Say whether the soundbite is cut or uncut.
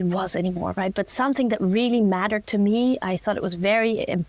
uncut